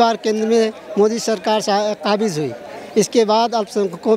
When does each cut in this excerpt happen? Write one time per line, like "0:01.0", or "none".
none